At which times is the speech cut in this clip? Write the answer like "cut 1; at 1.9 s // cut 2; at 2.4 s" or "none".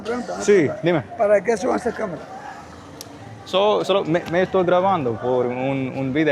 none